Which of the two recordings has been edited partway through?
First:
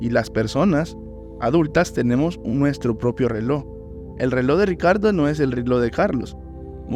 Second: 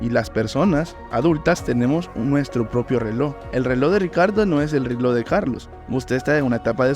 second; 3 cuts; at 1.0 s, 3.4 s, 5.7 s

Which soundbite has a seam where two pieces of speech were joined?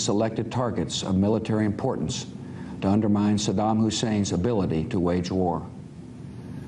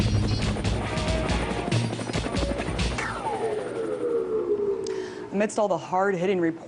first; 1 cut; at 4.9 s

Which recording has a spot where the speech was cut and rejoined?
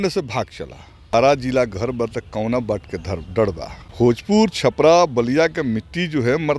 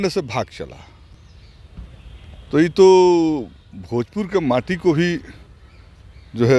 first; 2 cuts; at 1.3 s, 4.2 s

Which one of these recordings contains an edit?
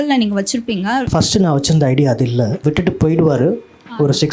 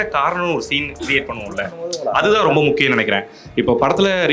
first; 2 cuts; at 1.1 s, 2.6 s

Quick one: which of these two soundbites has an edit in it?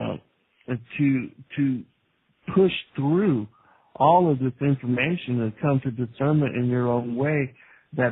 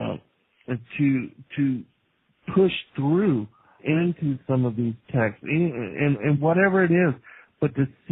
first; 1 cut; at 3.8 s

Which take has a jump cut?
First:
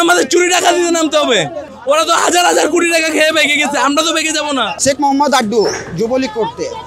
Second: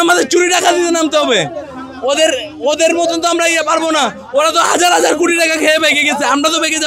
first; 2 cuts; at 1.7 s, 4.7 s

